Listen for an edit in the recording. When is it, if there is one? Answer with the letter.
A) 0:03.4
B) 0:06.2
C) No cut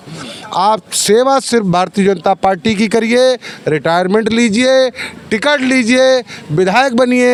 C